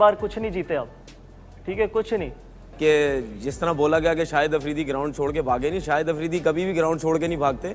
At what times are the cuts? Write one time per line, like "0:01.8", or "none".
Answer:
0:02.7